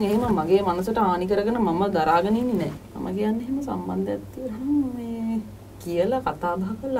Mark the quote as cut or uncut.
cut